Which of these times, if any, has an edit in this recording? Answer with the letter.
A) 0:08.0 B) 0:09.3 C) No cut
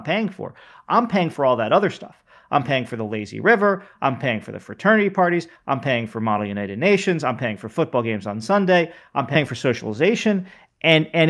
B